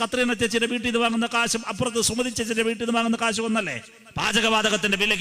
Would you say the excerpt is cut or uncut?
cut